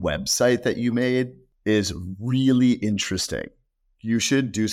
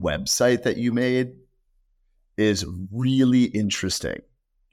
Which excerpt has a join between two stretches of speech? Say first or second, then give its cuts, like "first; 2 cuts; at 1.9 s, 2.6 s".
first; 1 cut; at 1.5 s